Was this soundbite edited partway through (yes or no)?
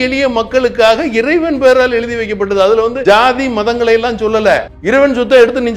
yes